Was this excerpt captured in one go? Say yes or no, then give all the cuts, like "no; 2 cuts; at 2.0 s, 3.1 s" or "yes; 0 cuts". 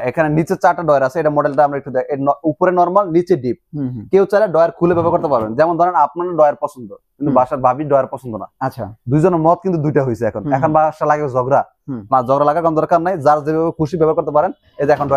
yes; 0 cuts